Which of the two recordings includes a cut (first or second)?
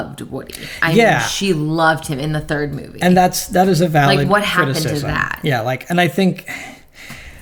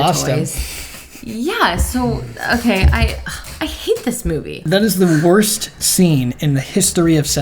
second